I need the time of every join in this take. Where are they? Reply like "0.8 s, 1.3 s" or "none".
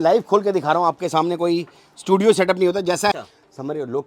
3.1 s